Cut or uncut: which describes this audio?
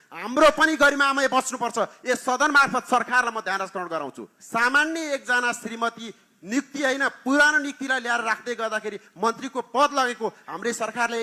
cut